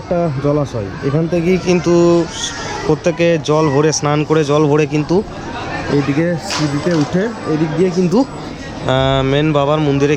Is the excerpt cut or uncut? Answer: uncut